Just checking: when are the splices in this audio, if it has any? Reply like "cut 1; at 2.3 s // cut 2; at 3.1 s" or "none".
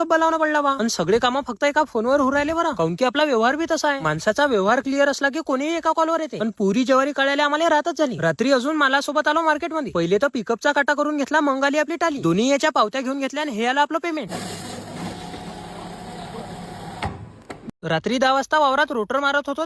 cut 1; at 17.8 s